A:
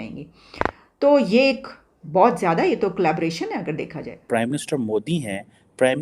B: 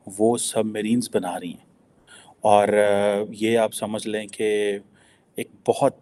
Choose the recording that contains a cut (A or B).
A